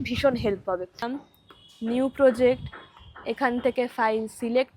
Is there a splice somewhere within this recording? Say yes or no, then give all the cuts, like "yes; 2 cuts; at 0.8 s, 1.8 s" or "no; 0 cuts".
yes; 1 cut; at 1.1 s